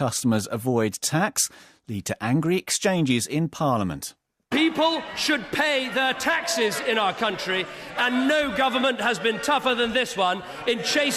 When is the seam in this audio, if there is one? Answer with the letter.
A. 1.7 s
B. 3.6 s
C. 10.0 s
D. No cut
D